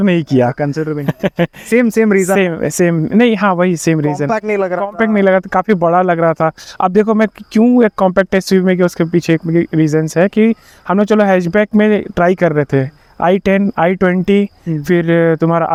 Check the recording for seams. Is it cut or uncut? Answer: uncut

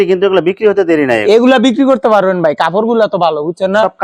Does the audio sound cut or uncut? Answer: uncut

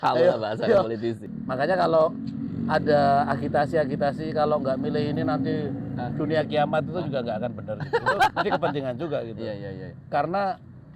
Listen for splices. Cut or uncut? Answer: cut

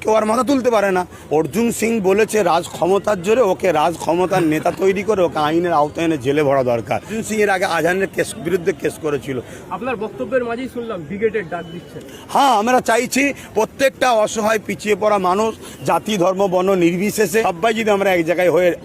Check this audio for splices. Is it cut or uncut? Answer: cut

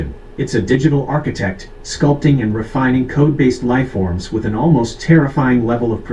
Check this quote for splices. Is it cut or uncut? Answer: uncut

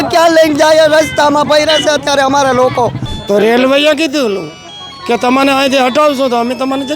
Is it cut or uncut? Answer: cut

